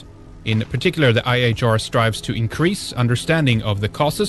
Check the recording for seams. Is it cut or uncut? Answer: cut